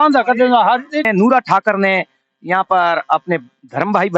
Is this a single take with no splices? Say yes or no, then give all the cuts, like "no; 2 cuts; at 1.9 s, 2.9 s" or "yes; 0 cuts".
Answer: no; 1 cut; at 1.1 s